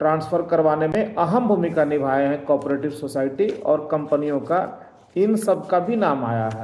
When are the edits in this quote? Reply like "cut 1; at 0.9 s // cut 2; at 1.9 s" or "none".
cut 1; at 0.9 s